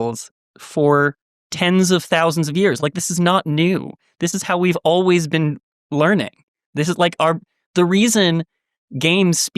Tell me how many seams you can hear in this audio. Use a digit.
0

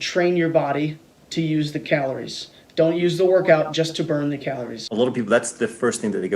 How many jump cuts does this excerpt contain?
1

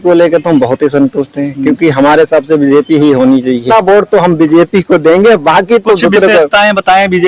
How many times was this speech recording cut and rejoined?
1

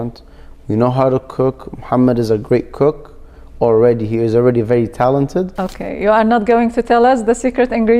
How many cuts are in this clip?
1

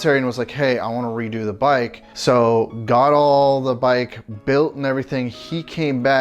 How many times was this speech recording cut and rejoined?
1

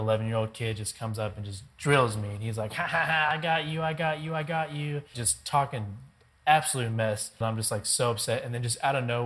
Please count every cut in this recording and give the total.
2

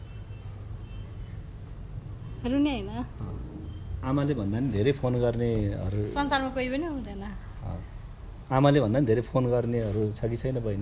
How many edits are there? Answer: 0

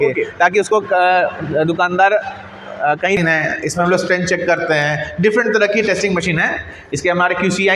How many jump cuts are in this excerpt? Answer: 1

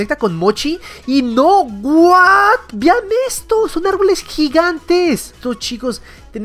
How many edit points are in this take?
1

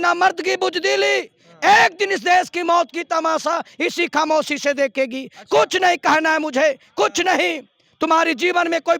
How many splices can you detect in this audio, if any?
0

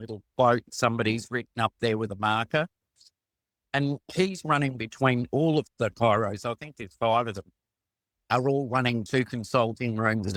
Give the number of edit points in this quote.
0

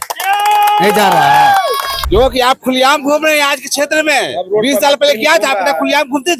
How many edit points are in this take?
1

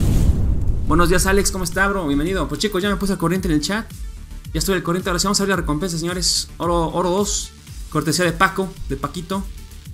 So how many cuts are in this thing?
1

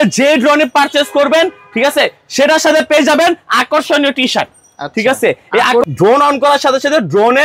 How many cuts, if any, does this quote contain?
1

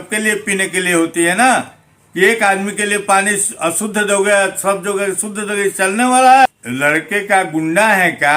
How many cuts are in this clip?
1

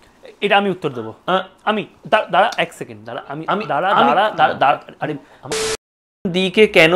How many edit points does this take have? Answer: 1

